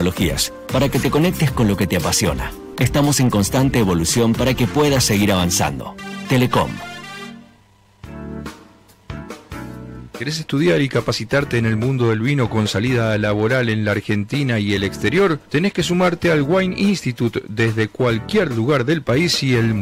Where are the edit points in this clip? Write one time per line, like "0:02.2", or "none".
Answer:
0:07.6